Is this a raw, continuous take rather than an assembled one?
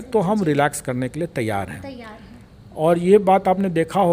yes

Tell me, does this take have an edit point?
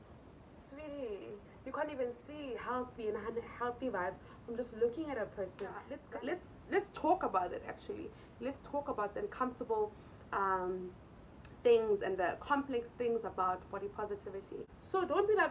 yes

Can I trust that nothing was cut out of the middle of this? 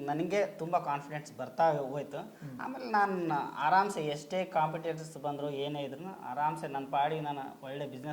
yes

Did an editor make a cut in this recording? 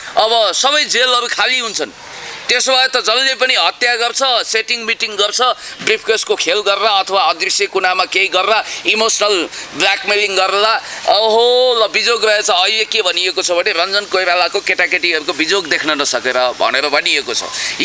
no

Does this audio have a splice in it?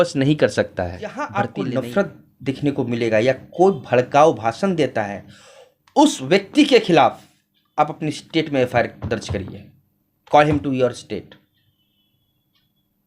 yes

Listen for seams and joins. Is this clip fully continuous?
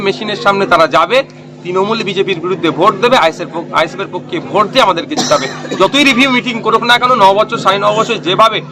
yes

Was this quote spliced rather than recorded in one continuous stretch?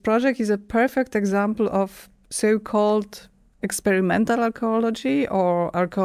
no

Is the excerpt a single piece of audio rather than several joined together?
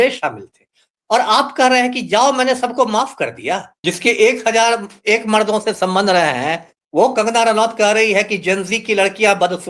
no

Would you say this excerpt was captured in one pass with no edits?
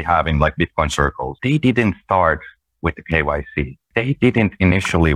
no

